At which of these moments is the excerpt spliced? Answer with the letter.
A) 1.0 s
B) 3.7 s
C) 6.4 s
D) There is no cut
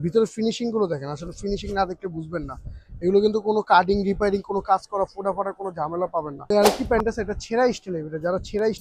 C